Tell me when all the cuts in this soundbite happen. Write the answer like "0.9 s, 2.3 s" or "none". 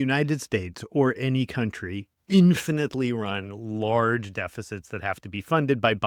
none